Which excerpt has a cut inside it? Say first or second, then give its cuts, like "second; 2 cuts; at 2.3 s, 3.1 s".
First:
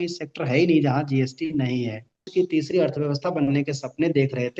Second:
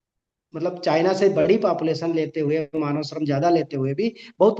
first; 1 cut; at 2.3 s